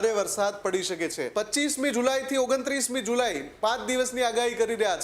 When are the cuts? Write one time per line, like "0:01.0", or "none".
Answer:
0:01.2